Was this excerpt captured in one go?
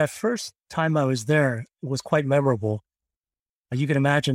yes; 0 cuts

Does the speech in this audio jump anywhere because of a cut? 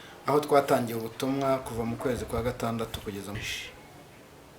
yes; 1 cut; at 3.4 s

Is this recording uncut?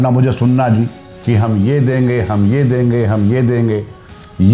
no; 1 cut; at 1.1 s

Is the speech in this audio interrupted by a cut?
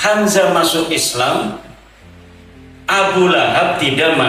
no; 0 cuts

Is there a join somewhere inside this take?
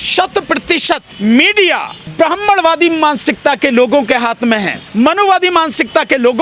yes; 3 cuts; at 1.1 s, 2.0 s, 4.8 s

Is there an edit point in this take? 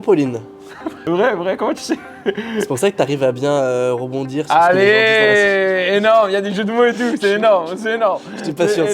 yes; 1 cut; at 1.0 s

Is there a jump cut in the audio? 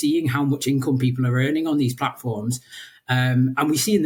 no; 0 cuts

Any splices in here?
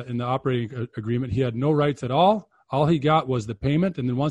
no; 0 cuts

